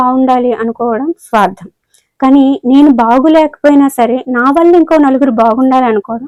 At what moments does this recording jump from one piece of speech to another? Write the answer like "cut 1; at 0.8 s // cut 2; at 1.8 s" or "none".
none

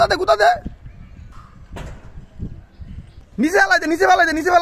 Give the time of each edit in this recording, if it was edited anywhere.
cut 1; at 3.3 s

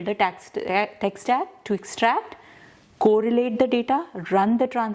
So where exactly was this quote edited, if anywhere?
none

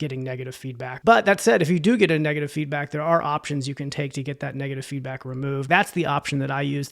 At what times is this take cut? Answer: cut 1; at 0.9 s // cut 2; at 5.6 s

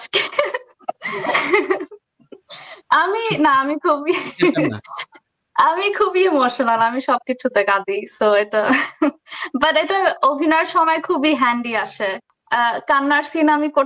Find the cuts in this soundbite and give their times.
cut 1; at 12.2 s

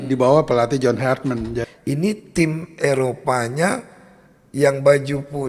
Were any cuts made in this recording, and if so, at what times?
cut 1; at 1.6 s

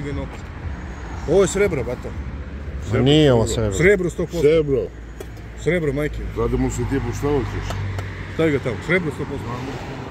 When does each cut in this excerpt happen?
none

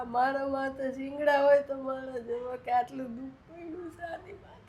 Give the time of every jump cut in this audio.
none

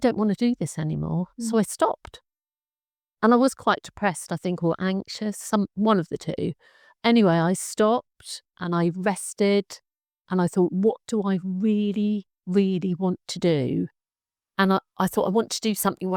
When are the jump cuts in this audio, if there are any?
none

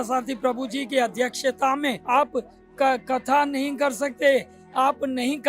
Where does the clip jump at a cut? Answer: cut 1; at 2.0 s

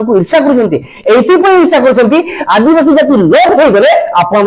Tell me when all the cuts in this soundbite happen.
none

